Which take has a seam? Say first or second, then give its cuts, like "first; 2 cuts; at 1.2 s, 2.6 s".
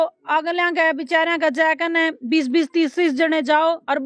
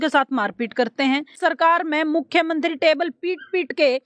second; 1 cut; at 1.3 s